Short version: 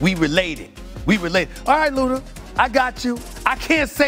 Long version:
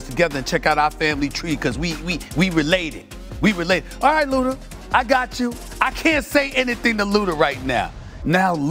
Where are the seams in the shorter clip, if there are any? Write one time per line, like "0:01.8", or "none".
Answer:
none